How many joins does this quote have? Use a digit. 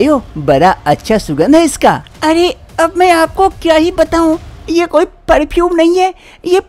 1